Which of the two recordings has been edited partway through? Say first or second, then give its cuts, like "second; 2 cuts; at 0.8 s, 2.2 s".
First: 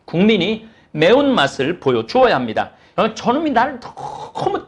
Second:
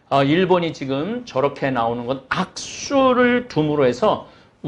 first; 1 cut; at 2.8 s